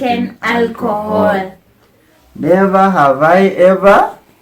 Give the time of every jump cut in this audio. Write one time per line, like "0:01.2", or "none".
none